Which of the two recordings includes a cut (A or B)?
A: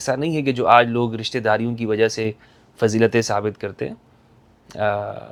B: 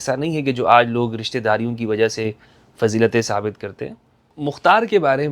B